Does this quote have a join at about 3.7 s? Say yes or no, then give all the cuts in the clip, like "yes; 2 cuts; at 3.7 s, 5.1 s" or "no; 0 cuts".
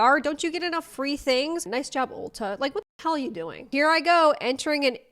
yes; 2 cuts; at 1.7 s, 3.7 s